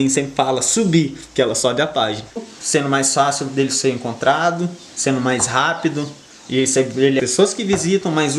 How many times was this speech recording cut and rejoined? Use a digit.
2